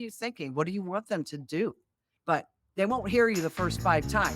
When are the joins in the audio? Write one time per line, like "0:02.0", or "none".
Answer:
0:02.1